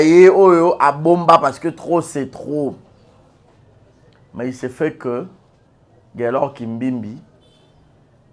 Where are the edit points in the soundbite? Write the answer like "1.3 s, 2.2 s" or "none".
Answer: none